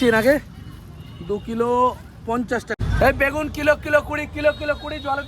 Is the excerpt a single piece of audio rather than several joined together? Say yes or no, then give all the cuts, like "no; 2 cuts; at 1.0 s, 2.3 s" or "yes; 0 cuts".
no; 1 cut; at 2.7 s